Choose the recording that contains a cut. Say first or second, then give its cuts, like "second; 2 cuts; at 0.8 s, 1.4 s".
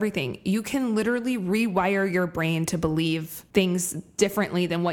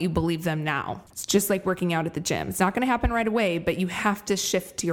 second; 1 cut; at 1.1 s